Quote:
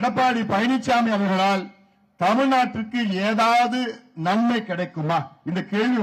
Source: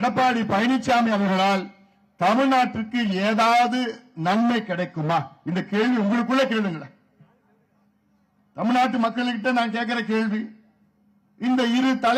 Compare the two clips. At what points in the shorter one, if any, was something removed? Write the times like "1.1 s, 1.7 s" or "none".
none